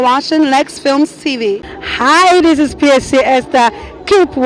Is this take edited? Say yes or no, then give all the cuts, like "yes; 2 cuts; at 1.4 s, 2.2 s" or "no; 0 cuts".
yes; 1 cut; at 1.7 s